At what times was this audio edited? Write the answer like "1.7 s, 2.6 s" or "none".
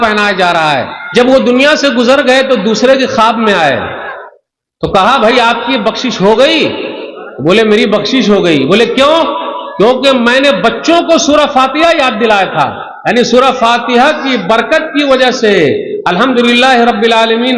1.0 s